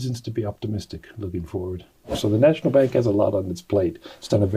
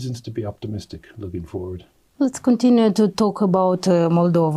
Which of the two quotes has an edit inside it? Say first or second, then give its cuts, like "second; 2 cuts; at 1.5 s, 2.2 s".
first; 1 cut; at 2.1 s